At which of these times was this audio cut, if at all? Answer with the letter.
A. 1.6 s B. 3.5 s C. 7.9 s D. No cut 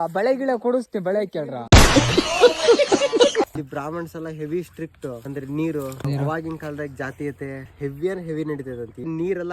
B